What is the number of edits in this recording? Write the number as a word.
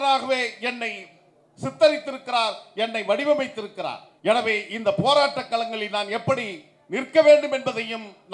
one